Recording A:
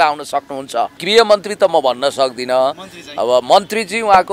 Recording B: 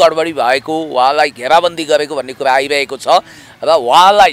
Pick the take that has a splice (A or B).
A